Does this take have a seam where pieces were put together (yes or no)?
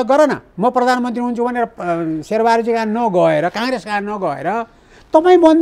no